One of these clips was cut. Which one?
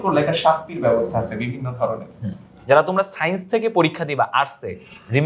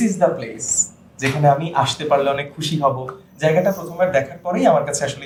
first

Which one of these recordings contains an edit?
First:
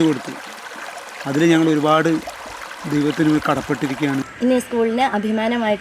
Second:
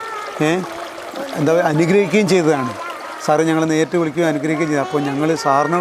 first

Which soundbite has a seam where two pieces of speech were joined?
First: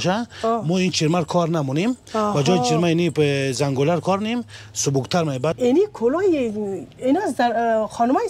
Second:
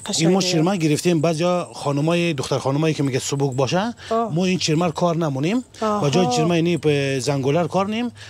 first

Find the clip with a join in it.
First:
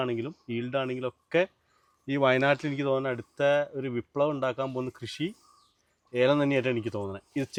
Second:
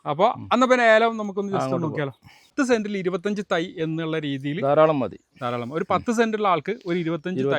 second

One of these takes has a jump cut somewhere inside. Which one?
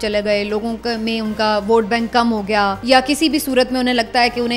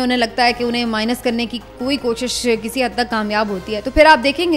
first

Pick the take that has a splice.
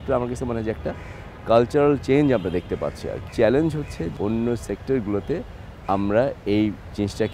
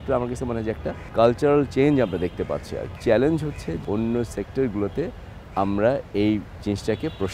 second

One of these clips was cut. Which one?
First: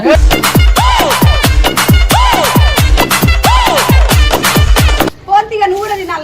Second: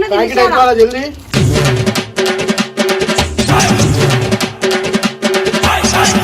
first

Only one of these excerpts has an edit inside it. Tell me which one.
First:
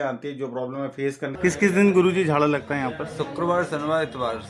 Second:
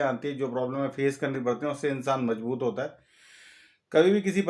first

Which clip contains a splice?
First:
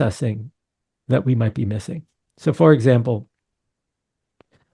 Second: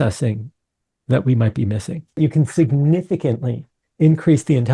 second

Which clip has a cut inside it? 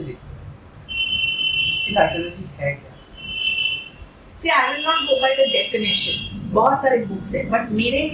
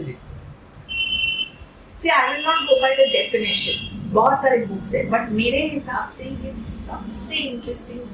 second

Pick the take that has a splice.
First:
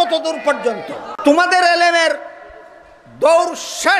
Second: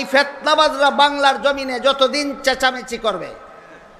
first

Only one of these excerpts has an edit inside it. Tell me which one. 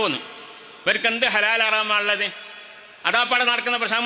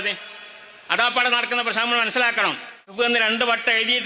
second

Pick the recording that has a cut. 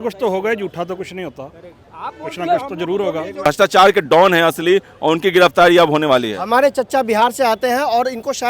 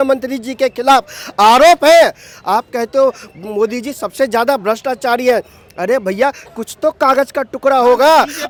first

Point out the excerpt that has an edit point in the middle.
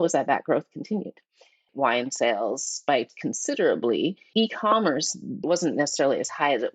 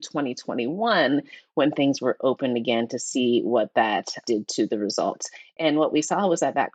first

